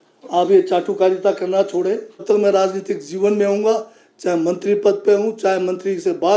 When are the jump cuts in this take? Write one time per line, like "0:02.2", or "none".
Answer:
0:02.2